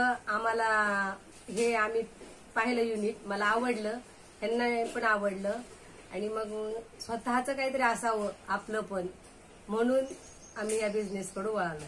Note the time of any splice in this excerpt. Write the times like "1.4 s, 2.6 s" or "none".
none